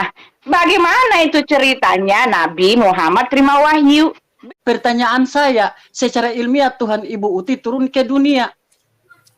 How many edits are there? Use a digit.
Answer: 1